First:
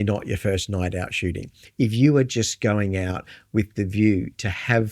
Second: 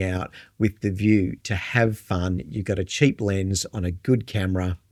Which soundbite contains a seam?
first; 1 cut; at 1.5 s

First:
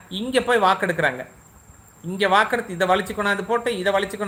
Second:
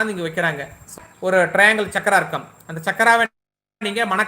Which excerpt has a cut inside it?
second; 1 cut; at 0.9 s

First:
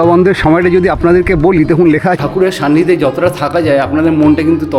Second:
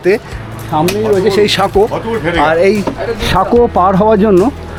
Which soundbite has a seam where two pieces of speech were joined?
first; 1 cut; at 2.2 s

